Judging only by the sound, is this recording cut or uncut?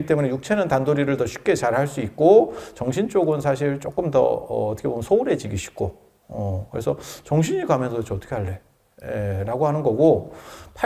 uncut